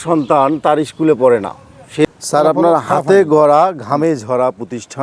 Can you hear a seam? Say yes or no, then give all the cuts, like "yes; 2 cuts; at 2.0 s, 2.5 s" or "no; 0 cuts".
yes; 1 cut; at 2.0 s